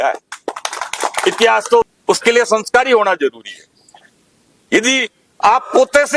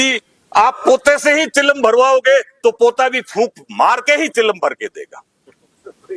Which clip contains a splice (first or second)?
first